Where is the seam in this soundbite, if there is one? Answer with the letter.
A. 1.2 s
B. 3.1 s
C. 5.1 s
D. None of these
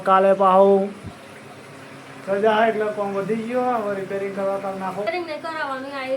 C